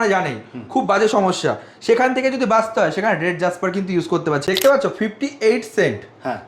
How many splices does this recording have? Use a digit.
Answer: 1